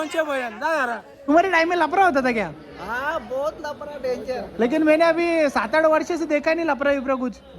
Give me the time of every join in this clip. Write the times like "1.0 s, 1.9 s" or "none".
1.3 s

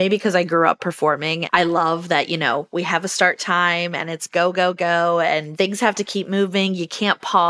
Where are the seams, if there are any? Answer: 1.3 s, 5.5 s

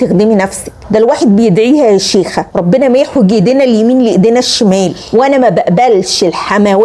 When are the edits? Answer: 5.0 s

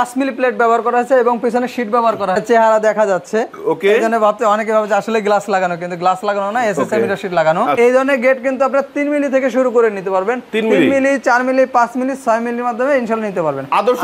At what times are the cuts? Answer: 2.4 s, 7.7 s

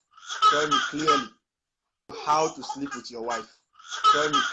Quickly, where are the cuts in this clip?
2.2 s

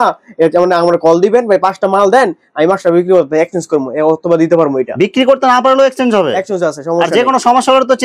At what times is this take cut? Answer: none

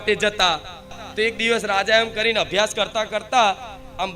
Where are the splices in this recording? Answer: 1.0 s

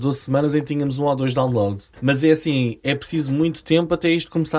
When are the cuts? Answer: 1.9 s

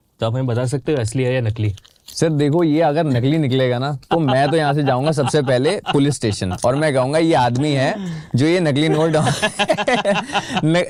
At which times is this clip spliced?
none

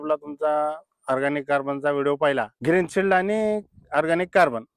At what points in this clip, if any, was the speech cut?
2.5 s

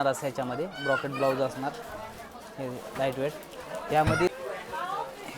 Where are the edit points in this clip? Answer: 4.3 s

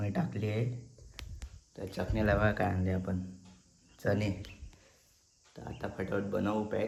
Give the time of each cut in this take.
none

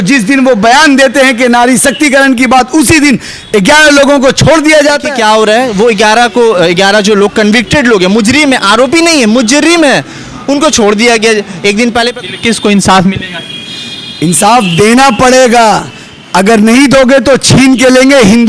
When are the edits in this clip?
5.0 s, 12.1 s

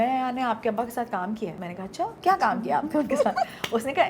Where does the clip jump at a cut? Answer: 2.0 s

